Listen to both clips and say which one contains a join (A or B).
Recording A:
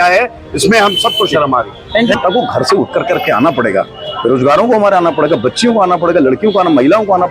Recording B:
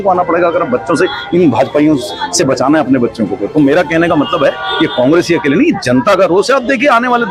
A